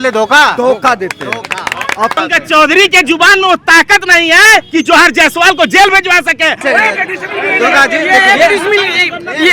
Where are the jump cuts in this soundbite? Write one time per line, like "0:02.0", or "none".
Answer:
0:02.1
0:06.6